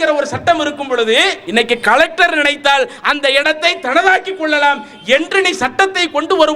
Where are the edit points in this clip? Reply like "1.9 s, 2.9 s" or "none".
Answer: 1.4 s